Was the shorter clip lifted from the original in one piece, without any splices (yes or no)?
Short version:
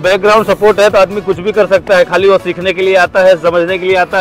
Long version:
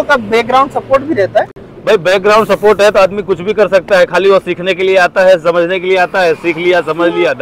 yes